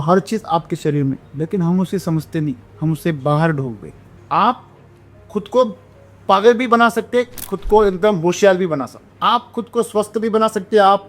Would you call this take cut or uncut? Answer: cut